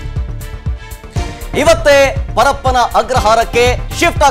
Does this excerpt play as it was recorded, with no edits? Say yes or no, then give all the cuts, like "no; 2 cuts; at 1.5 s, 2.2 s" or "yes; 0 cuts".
no; 1 cut; at 1.5 s